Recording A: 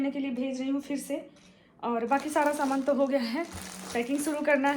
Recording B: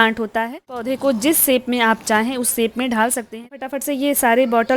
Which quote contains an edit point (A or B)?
B